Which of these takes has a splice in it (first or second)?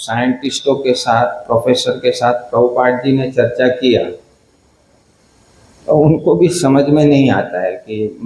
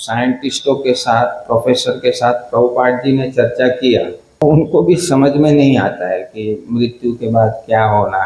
second